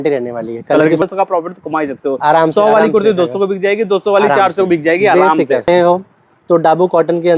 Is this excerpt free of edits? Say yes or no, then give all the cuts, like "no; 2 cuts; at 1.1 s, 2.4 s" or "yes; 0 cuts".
no; 2 cuts; at 1.0 s, 5.7 s